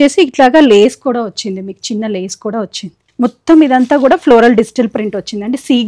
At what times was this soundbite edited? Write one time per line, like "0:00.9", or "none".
0:03.0

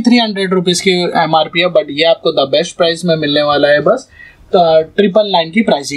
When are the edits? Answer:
none

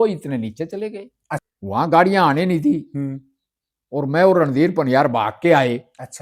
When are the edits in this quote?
0:01.4

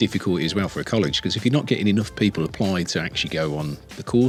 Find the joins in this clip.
none

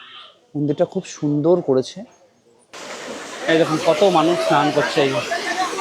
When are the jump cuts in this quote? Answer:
0:02.5

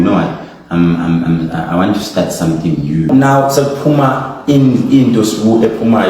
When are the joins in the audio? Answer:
0:03.1

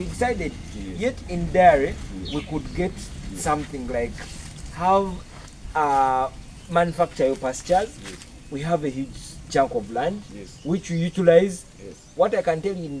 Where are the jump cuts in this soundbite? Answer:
none

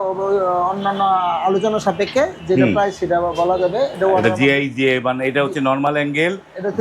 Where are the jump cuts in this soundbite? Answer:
none

